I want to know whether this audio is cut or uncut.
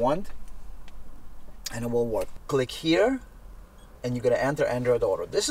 cut